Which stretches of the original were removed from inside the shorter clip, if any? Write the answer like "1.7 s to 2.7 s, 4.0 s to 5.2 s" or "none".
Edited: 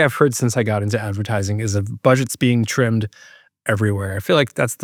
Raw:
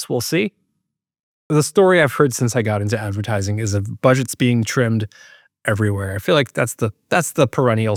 none